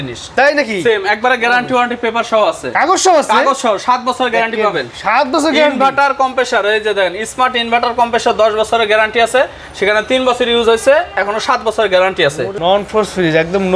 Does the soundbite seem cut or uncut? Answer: cut